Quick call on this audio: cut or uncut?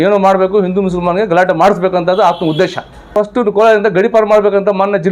cut